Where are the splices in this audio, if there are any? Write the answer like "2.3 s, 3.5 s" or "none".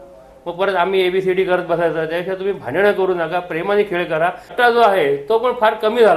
4.5 s